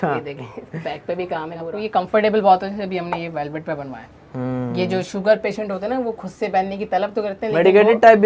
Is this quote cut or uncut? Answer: cut